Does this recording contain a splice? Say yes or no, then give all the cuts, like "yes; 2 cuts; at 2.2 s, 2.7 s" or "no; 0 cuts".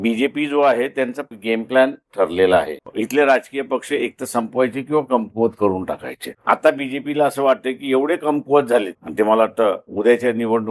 no; 0 cuts